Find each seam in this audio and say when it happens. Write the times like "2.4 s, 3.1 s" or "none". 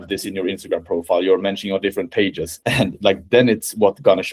2.5 s